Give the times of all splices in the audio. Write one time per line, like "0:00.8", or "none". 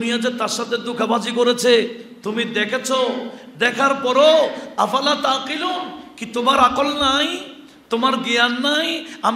none